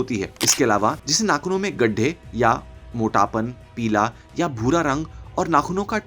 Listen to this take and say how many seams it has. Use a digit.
1